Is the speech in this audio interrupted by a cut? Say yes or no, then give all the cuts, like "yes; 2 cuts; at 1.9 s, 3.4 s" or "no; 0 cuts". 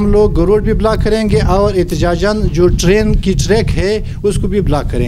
no; 0 cuts